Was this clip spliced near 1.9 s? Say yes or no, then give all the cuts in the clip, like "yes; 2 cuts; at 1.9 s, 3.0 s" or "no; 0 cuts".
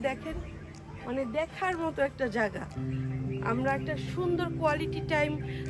no; 0 cuts